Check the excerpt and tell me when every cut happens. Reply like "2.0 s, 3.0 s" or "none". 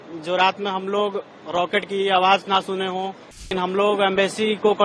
3.5 s